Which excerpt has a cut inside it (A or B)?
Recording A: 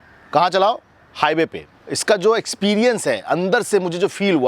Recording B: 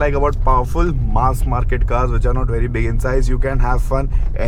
A